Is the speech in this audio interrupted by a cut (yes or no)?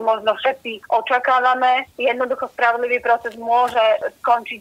yes